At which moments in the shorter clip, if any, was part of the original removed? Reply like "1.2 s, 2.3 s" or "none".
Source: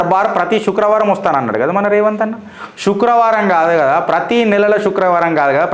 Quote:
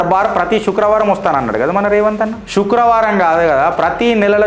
2.4 s